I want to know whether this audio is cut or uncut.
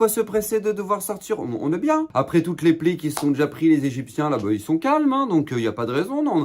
cut